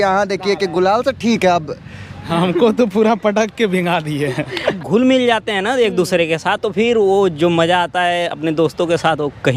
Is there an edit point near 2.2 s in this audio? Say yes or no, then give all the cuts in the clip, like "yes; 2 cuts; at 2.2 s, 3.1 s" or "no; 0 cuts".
yes; 2 cuts; at 2.2 s, 4.8 s